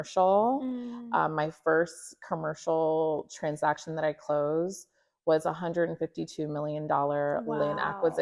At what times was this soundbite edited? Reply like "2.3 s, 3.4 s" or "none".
none